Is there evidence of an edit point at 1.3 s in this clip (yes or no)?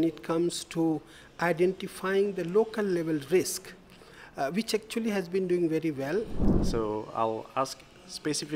no